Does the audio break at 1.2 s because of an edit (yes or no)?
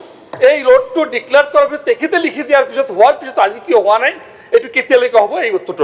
no